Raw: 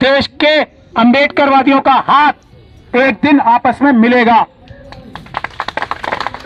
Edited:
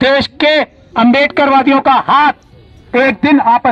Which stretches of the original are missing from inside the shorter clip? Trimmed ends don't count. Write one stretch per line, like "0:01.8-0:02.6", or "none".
none

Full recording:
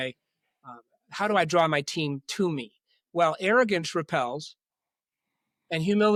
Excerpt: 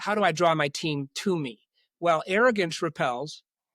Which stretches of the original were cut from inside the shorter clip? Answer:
none

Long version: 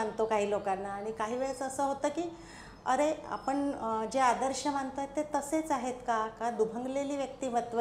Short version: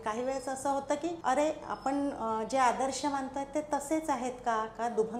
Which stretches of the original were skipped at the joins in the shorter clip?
0:02.3-0:02.8

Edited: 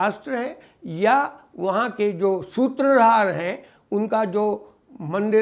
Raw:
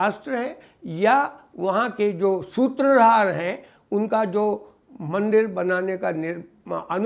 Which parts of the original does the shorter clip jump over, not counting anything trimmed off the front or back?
none

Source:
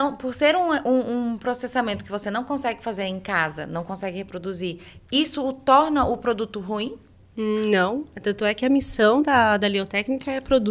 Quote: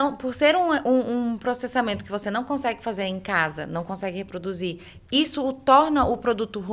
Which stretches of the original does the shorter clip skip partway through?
none

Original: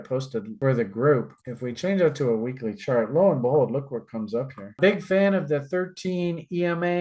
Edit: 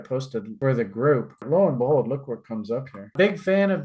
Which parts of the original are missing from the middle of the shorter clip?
0:01.4-0:03.1

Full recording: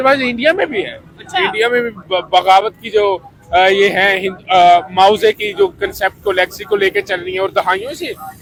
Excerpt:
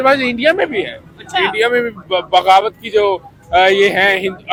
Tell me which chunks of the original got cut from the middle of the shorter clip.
none

